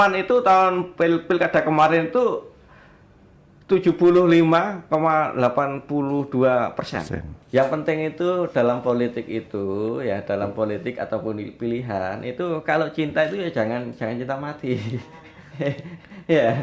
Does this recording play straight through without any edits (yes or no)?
no